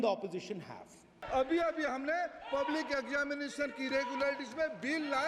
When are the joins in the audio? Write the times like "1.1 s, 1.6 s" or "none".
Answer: 1.2 s